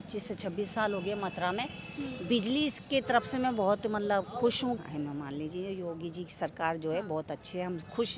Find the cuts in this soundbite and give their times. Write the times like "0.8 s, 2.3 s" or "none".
4.8 s